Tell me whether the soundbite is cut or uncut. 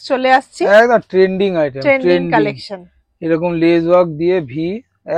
uncut